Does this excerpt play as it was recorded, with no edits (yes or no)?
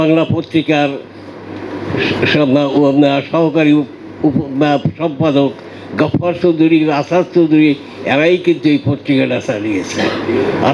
yes